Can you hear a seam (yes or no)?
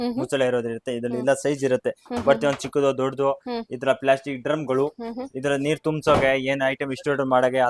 no